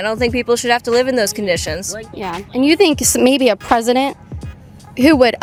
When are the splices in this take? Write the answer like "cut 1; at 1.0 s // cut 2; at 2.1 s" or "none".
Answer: none